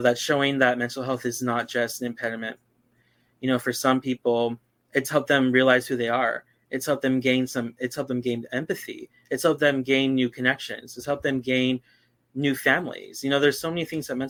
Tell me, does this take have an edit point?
no; 0 cuts

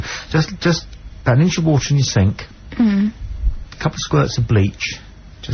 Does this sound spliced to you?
no; 0 cuts

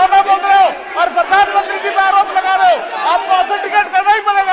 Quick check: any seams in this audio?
no; 0 cuts

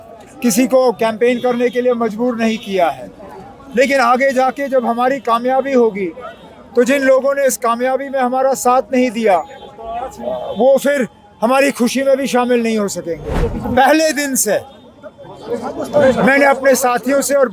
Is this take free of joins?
no; 1 cut; at 13.4 s

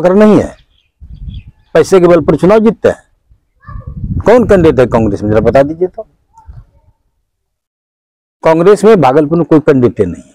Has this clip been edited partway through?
no; 0 cuts

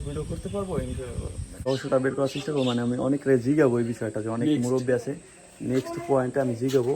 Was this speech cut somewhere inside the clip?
yes; 1 cut; at 1.7 s

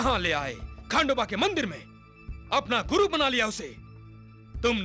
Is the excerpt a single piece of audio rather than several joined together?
yes; 0 cuts

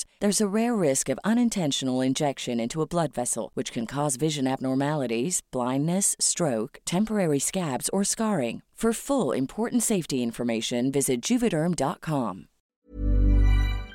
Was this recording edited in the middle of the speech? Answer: yes; 1 cut; at 12.7 s

